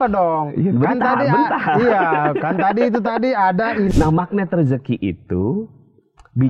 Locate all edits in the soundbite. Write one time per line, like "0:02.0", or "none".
0:03.9

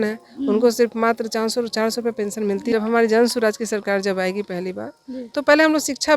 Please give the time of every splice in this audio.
0:02.7

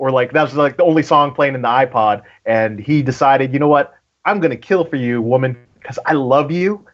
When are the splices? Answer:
none

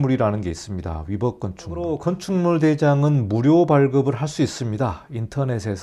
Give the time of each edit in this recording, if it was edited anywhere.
0:01.9

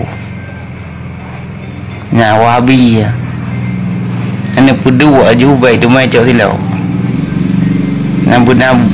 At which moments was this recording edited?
none

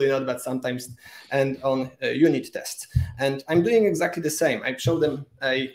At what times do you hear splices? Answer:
none

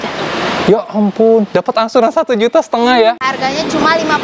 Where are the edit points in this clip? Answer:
0:03.2

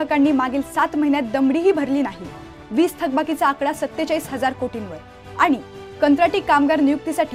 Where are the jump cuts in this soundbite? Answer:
none

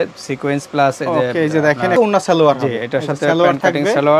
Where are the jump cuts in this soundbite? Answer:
0:02.0

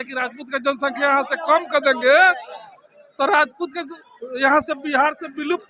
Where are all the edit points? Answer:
none

